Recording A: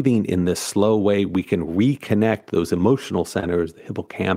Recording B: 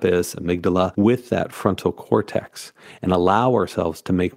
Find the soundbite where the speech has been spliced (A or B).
B